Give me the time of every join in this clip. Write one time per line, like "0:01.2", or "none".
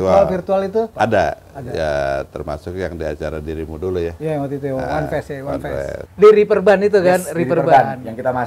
0:00.9
0:06.0